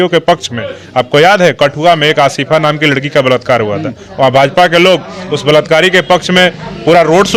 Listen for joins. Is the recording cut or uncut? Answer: uncut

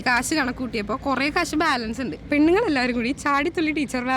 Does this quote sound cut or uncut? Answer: cut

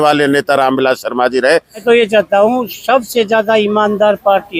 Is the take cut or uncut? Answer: cut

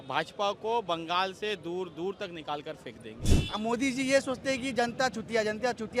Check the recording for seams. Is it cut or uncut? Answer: cut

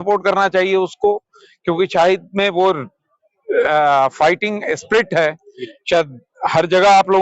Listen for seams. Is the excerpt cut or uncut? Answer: uncut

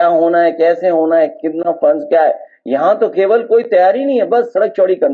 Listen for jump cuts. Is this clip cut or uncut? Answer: uncut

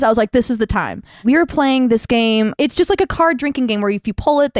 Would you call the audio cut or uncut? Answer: cut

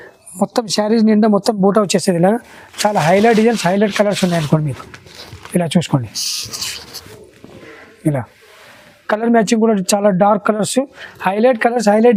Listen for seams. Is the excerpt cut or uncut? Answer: uncut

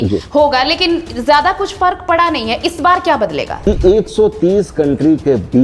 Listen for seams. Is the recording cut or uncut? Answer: cut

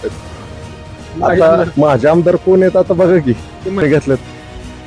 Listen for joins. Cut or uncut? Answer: cut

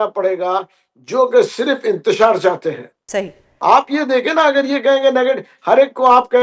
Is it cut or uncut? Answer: uncut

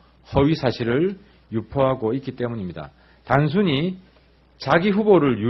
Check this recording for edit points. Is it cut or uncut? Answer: uncut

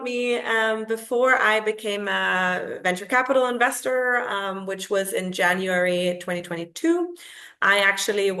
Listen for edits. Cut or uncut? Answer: uncut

